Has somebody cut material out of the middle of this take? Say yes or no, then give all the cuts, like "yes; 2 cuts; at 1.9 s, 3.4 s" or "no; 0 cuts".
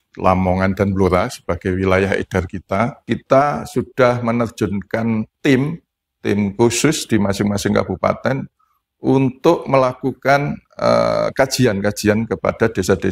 yes; 1 cut; at 3.0 s